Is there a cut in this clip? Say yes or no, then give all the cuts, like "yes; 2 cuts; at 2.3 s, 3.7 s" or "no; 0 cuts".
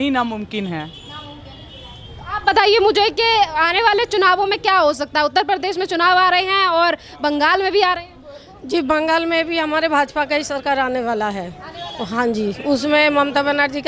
no; 0 cuts